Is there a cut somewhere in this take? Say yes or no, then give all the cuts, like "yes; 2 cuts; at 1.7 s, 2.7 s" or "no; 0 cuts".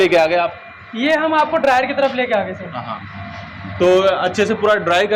no; 0 cuts